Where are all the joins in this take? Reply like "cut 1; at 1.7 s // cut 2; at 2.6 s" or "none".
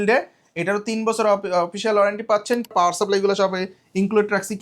cut 1; at 2.7 s